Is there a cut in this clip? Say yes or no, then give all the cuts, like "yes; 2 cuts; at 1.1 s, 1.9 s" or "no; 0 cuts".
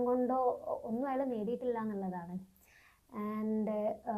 no; 0 cuts